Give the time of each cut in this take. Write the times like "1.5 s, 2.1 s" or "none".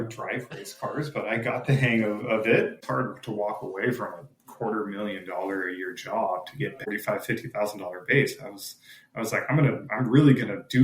2.8 s, 6.8 s